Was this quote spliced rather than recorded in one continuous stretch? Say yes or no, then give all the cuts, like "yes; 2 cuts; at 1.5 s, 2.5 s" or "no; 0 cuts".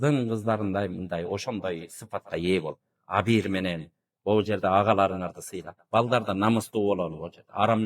no; 0 cuts